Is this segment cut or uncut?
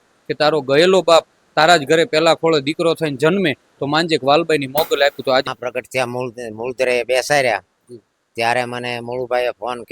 cut